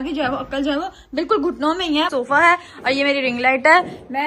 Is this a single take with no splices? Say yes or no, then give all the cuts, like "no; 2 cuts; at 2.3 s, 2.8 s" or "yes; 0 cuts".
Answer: no; 1 cut; at 2.1 s